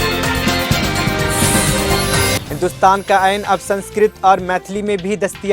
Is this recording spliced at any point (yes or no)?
yes